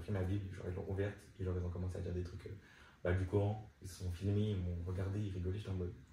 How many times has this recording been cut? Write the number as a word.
zero